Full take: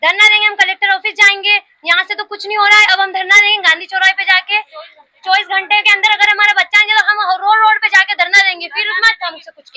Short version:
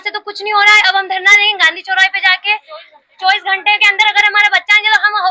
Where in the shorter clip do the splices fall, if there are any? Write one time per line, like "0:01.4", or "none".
none